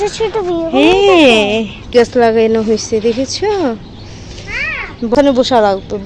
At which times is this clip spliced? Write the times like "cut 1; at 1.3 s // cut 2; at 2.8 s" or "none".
cut 1; at 1.9 s // cut 2; at 5.1 s